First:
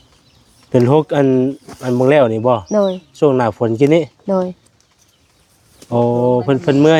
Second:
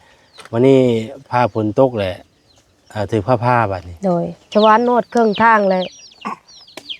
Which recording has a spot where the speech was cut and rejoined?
second; 1 cut; at 4.5 s

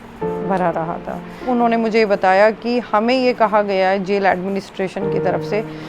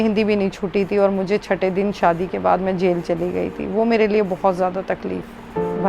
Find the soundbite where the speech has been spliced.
first; 1 cut; at 1.5 s

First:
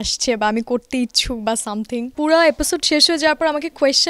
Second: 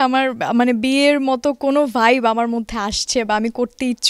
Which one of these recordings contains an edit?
first; 1 cut; at 2.1 s

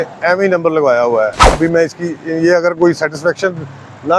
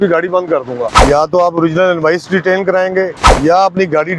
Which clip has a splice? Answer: second; 2 cuts; at 1.0 s, 3.2 s

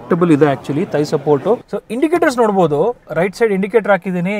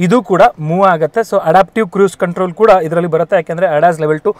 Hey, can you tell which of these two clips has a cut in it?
first; 1 cut; at 1.6 s

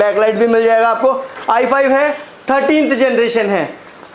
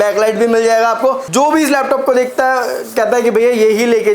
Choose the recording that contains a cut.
second; 1 cut; at 1.2 s

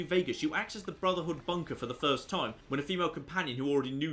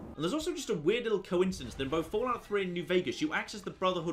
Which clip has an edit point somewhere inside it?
first; 1 cut; at 2.4 s

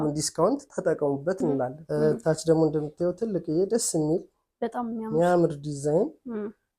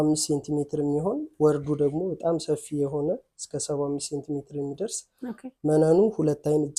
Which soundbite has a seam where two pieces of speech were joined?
first; 1 cut; at 1.8 s

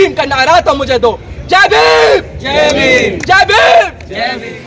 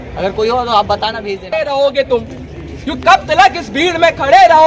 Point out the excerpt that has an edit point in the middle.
second; 1 cut; at 1.3 s

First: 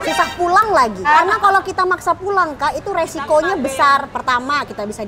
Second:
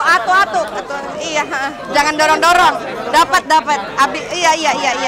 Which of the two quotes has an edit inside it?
first; 1 cut; at 1.1 s

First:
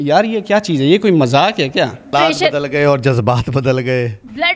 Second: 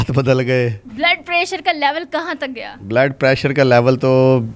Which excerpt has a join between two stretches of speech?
first; 1 cut; at 2.1 s

